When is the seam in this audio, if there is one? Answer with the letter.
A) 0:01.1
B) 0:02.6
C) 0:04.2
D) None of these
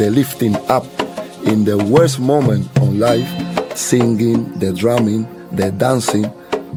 D